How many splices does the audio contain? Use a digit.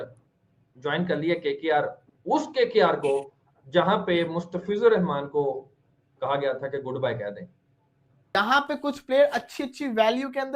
1